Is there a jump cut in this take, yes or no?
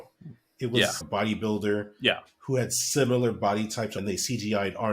yes